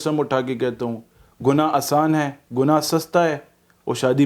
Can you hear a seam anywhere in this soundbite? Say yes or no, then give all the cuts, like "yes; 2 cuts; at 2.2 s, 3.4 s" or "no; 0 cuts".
no; 0 cuts